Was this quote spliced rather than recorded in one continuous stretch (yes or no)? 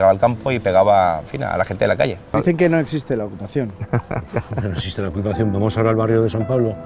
yes